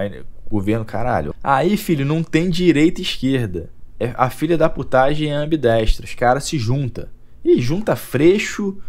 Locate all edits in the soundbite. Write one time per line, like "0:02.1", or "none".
0:01.3